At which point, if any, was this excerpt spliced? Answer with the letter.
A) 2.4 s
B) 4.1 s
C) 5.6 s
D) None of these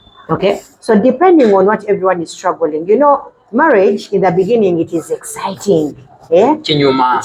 D